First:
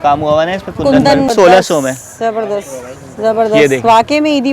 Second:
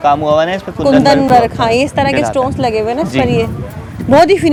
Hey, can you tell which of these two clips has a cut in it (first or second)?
first